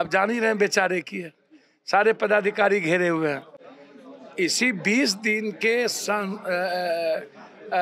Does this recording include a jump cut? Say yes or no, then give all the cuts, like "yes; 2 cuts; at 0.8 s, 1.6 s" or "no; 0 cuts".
no; 0 cuts